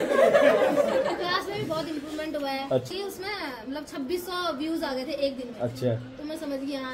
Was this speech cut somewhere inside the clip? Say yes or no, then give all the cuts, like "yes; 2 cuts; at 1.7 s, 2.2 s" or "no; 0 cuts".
yes; 1 cut; at 2.9 s